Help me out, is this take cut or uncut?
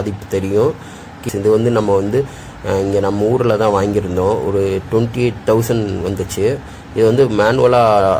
cut